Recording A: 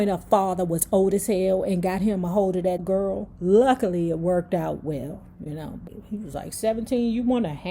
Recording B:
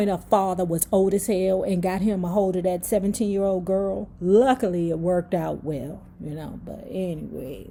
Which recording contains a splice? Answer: A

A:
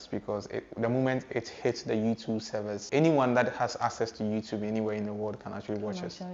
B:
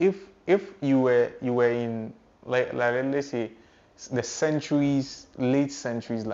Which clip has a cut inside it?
A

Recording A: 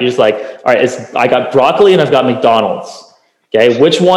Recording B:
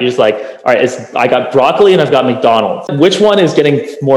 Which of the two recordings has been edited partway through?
B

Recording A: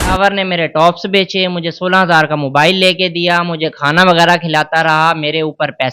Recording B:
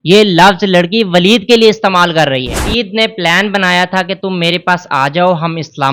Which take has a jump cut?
B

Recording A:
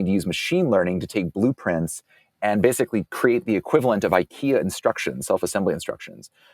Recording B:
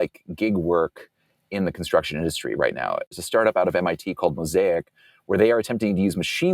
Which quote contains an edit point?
B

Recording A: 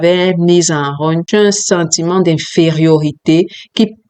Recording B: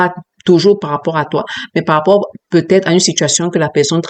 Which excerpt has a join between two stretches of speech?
A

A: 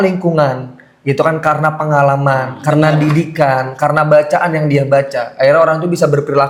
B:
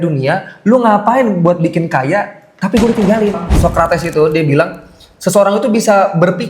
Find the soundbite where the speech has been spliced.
B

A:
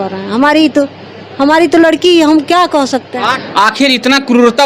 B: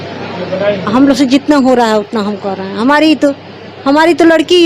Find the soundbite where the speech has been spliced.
A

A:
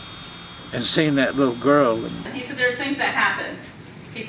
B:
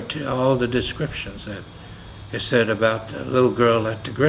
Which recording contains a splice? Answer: A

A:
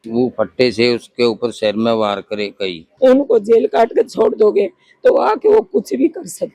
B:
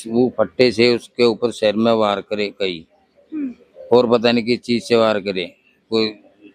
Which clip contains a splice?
A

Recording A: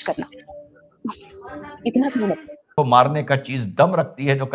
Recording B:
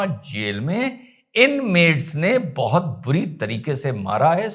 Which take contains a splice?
A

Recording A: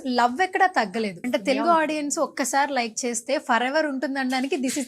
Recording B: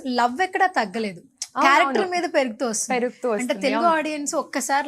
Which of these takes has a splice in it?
A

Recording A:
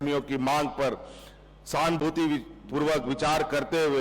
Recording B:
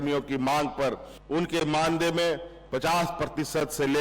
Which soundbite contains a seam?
B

